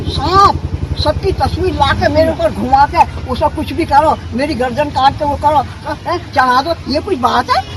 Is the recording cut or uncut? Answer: uncut